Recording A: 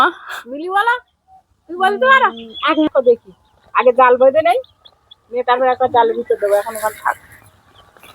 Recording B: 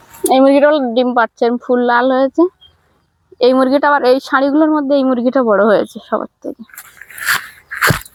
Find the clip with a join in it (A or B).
A